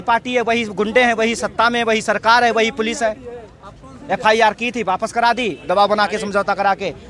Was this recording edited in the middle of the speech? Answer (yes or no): no